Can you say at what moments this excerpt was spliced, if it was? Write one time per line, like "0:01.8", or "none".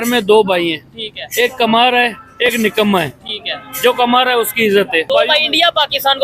0:05.1

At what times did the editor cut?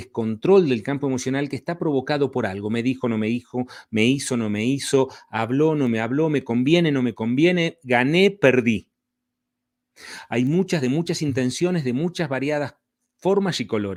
none

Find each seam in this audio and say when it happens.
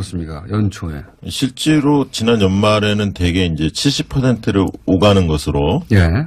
0:01.0

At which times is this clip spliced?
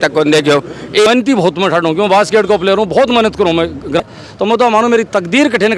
0:01.1
0:04.0

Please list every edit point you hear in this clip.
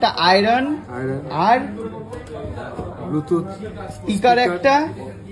none

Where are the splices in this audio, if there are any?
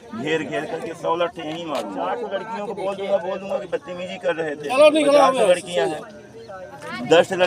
0:02.0

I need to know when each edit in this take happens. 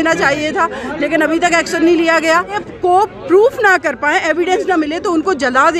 0:02.7

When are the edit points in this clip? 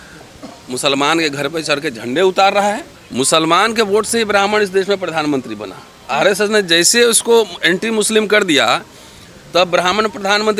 0:02.9

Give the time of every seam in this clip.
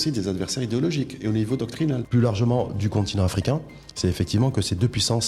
0:02.0

